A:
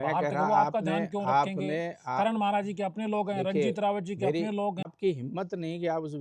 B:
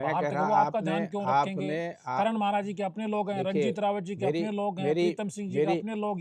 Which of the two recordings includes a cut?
A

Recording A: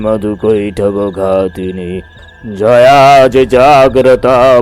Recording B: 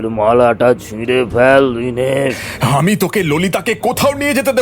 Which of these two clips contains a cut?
B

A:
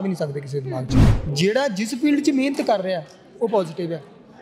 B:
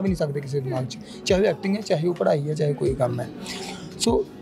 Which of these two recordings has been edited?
A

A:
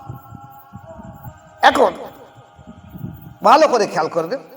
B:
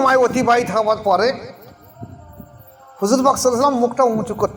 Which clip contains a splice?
A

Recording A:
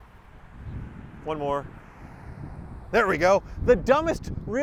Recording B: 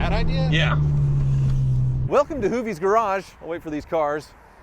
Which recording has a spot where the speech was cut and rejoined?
B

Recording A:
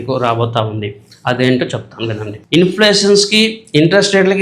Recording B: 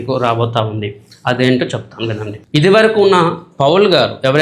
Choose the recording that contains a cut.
A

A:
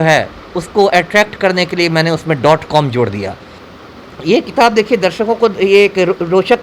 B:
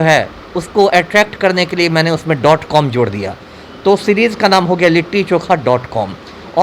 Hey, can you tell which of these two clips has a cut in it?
A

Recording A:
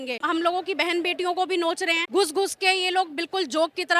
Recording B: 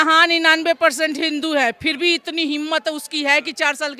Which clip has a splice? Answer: A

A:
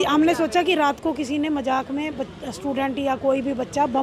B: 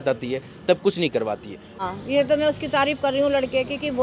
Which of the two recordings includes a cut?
B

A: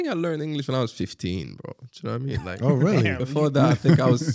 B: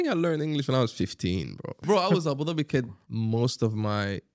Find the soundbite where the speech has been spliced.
B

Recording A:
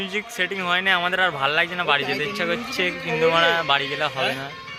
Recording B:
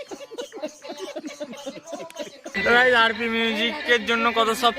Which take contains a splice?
B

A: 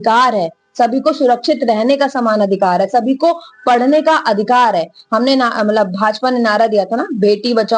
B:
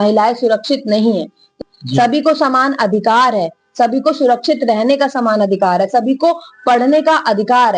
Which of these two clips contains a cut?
B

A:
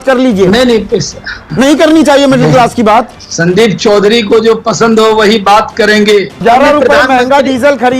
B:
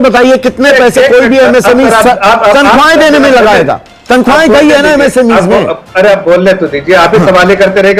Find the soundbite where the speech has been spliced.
A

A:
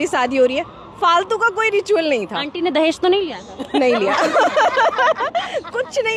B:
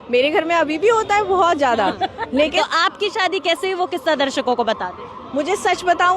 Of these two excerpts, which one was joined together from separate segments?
B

